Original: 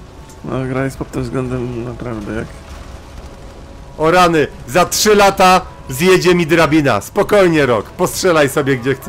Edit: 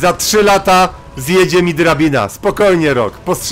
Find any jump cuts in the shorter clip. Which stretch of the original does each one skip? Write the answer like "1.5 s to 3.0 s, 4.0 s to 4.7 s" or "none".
none